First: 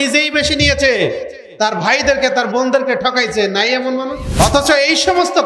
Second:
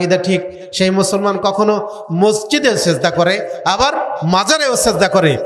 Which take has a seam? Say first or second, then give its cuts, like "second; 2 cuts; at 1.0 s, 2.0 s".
first; 1 cut; at 4.2 s